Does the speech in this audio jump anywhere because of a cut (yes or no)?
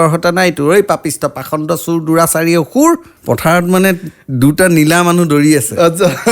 yes